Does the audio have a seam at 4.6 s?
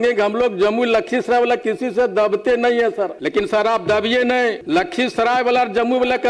yes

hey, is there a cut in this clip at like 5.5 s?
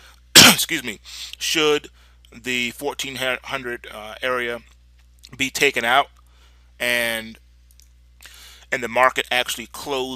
yes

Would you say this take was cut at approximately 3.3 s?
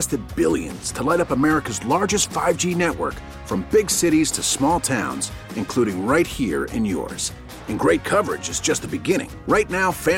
no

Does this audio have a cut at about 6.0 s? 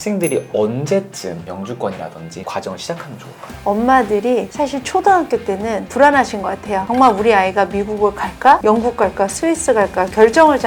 no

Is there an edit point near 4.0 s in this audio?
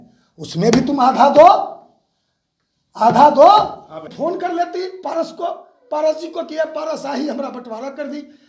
yes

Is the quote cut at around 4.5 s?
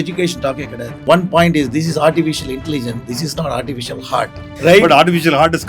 yes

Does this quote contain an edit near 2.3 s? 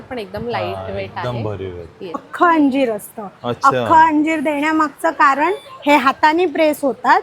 yes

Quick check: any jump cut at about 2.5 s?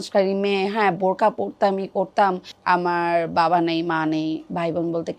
yes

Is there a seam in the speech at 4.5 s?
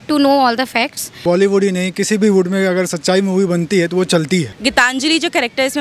yes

